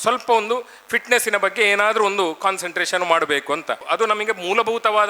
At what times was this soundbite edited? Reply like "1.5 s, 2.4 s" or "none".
3.8 s